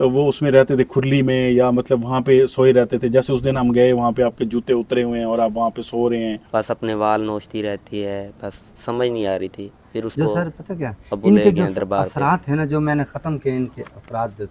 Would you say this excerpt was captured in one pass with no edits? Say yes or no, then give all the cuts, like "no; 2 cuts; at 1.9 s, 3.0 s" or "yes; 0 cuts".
no; 1 cut; at 6.4 s